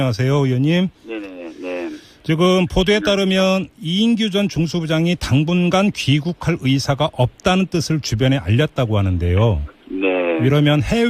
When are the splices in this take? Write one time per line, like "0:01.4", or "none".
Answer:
0:06.4